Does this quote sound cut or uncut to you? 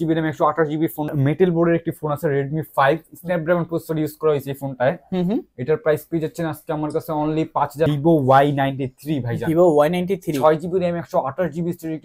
cut